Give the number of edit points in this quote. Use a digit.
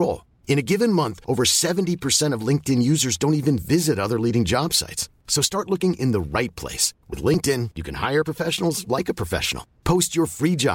0